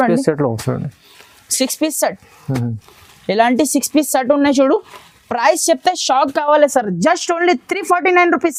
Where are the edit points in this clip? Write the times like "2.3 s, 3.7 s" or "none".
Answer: none

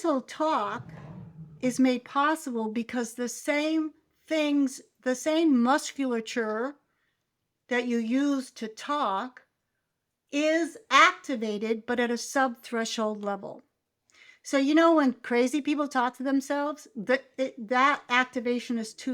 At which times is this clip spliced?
none

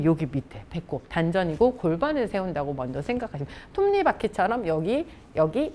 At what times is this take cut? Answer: none

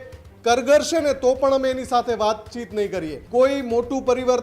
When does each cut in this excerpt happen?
3.2 s

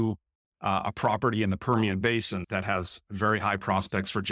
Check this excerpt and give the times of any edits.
2.4 s

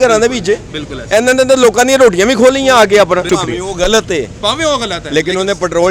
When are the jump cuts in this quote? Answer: 3.3 s

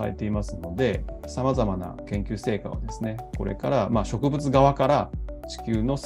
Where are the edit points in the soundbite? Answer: 1.1 s, 2.0 s

